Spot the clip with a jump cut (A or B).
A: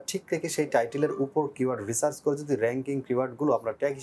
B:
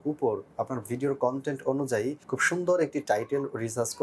B